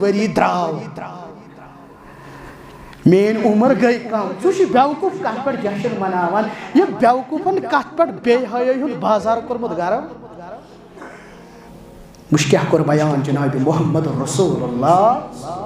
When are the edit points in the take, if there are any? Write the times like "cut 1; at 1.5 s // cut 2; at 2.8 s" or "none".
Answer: cut 1; at 11.7 s